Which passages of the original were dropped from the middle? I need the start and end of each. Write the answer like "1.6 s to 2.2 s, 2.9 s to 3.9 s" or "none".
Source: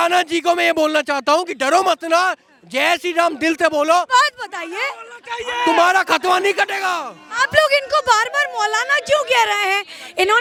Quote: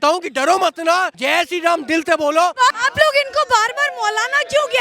2.4 s to 2.7 s, 4.3 s to 7.3 s